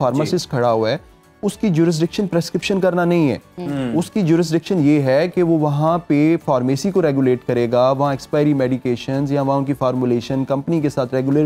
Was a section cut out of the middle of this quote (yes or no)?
no